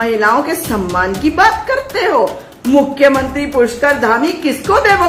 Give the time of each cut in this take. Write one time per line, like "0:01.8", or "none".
none

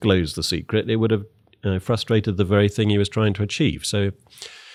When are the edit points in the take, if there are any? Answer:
none

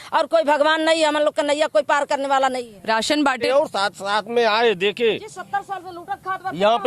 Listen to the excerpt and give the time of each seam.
0:03.5

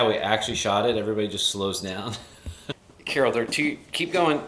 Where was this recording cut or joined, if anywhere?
0:02.7

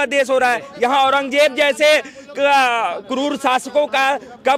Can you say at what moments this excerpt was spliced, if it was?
none

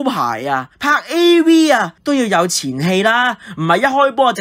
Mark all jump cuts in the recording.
none

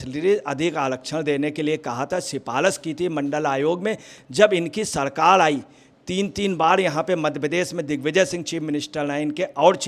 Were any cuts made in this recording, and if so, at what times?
none

